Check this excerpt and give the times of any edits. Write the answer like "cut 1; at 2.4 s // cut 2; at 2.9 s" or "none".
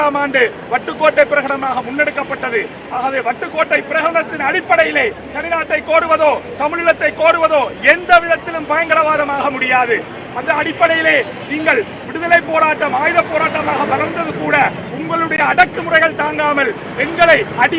none